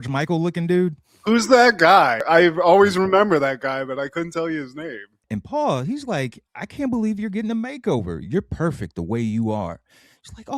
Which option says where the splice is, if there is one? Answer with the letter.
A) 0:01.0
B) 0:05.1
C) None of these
B